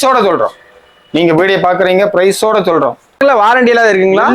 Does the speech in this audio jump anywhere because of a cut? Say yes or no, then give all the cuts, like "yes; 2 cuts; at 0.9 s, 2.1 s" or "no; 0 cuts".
yes; 1 cut; at 3.2 s